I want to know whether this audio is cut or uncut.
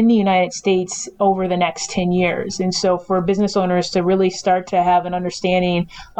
uncut